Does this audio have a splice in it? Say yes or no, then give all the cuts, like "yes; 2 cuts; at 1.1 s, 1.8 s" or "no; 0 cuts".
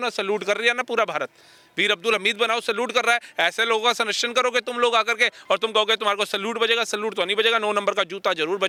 no; 0 cuts